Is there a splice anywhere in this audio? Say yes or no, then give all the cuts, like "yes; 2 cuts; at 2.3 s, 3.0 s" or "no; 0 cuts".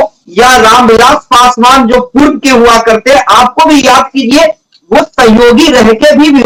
no; 0 cuts